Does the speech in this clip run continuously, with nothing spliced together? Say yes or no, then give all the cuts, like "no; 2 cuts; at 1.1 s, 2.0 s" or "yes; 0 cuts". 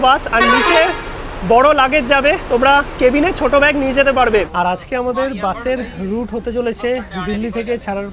no; 1 cut; at 4.5 s